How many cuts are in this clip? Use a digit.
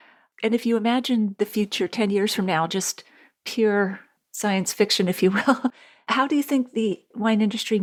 0